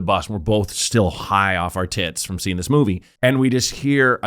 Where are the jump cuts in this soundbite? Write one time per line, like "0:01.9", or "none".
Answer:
0:03.0